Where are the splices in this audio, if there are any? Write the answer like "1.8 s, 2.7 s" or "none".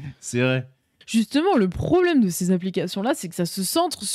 1.0 s